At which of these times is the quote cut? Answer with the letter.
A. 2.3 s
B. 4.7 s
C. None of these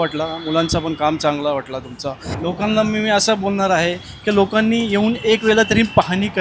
A